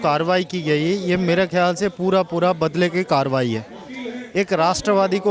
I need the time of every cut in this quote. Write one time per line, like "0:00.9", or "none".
none